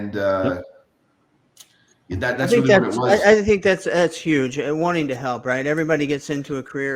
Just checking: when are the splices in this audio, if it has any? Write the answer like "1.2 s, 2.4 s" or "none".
none